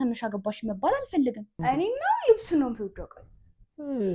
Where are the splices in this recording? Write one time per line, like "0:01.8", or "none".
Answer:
0:01.6